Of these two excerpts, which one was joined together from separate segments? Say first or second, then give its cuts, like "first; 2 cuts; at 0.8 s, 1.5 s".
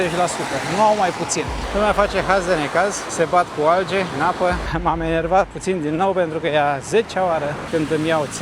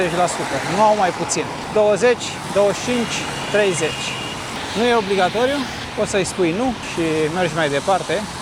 first; 4 cuts; at 1.6 s, 3.0 s, 4.4 s, 7.6 s